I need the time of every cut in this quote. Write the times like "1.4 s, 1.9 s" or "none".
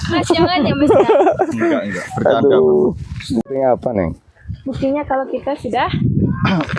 3.4 s